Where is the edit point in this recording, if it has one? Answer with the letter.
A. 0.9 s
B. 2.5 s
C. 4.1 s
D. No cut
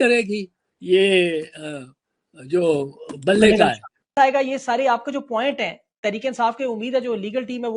C